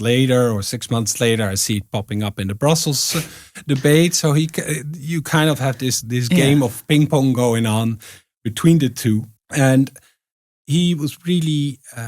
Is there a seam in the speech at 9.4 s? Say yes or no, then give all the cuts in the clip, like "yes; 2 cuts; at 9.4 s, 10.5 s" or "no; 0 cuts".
yes; 1 cut; at 9.4 s